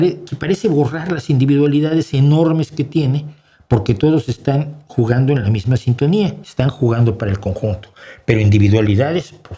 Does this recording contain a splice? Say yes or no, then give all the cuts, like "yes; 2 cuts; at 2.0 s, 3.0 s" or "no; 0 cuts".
no; 0 cuts